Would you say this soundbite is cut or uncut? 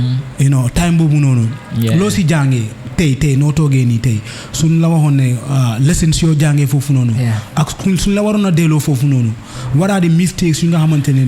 uncut